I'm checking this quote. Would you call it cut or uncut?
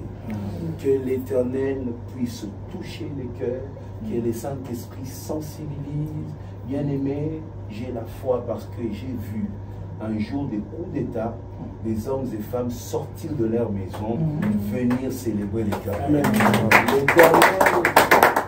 uncut